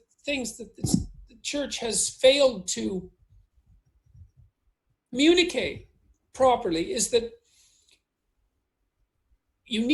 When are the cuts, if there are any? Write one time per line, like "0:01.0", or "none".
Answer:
none